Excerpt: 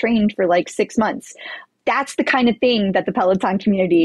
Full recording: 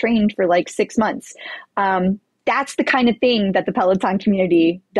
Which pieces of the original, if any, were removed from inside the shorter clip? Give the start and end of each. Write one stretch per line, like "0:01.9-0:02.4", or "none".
0:01.6-0:02.3